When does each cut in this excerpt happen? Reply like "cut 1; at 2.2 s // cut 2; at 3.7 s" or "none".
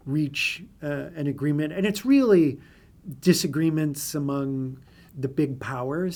none